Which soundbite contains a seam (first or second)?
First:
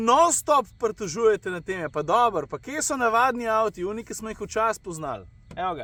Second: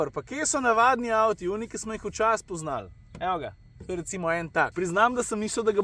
second